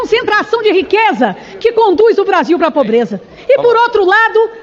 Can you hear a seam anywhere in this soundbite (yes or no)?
no